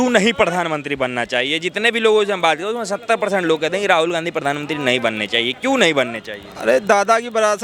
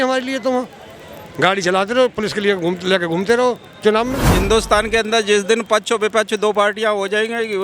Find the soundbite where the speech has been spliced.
second; 1 cut; at 4.3 s

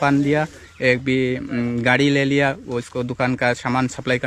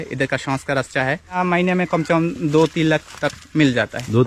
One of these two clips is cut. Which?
second; 1 cut; at 1.4 s

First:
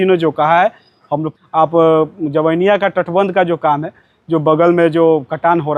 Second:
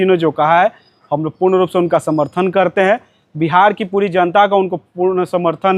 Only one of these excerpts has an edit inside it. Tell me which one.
first; 1 cut; at 1.3 s

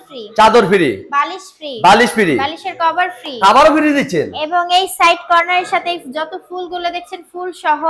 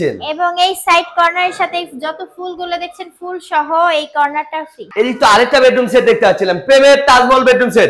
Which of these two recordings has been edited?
second; 1 cut; at 4.9 s

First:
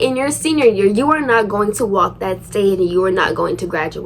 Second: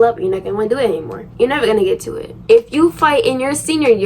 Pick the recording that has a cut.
second; 2 cuts; at 1.2 s, 2.3 s

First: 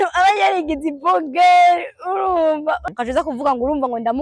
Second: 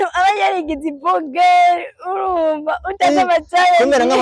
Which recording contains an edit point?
first; 1 cut; at 2.9 s

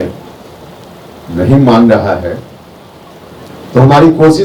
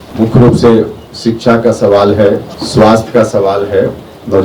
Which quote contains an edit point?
second; 2 cuts; at 1.0 s, 2.6 s

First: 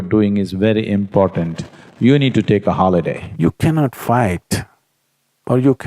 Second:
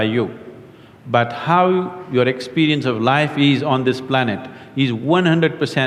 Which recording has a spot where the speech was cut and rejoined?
first; 1 cut; at 3.2 s

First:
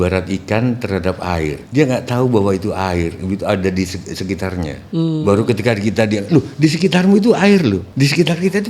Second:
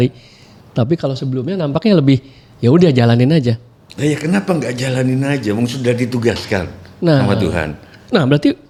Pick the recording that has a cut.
first; 3 cuts; at 1.6 s, 4.8 s, 7.9 s

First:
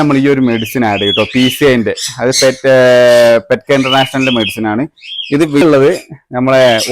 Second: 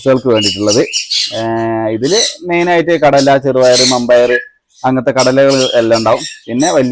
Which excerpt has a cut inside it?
first; 1 cut; at 5.6 s

